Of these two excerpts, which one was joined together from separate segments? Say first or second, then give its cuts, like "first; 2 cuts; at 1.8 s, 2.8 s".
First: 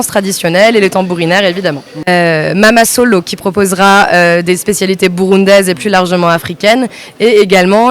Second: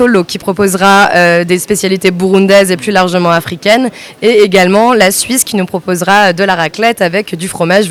first; 1 cut; at 2.0 s